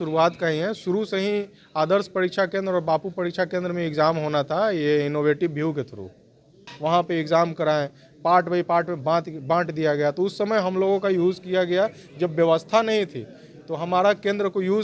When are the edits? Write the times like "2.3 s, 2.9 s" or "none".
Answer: 6.7 s